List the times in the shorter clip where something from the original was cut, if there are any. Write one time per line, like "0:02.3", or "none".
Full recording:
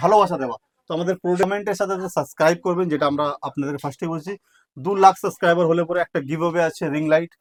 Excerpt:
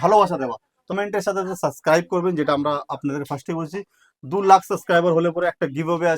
0:00.9